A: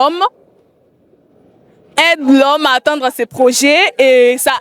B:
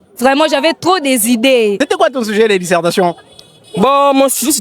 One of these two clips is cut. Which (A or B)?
B